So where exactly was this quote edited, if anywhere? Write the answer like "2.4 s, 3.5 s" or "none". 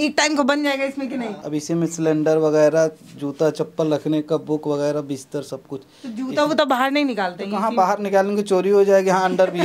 1.4 s